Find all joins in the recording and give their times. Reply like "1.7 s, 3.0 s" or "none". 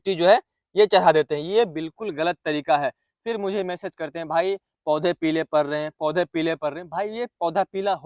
none